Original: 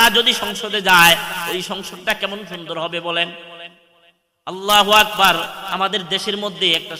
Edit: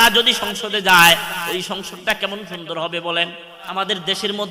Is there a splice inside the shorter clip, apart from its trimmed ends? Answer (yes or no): yes